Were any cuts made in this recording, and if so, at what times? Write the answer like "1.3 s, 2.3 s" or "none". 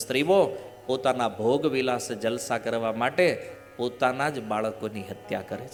none